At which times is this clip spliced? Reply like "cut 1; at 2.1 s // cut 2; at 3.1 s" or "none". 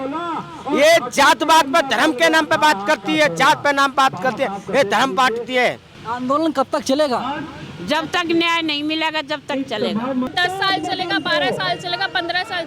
cut 1; at 5.9 s // cut 2; at 10.3 s